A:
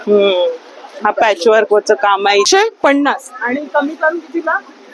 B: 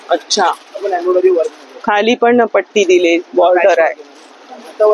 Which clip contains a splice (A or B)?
A